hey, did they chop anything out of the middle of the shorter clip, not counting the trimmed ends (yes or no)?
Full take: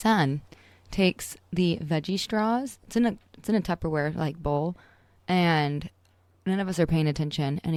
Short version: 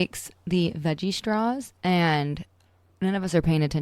yes